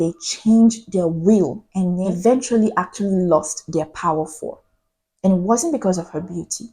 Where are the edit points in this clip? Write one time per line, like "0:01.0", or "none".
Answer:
0:02.0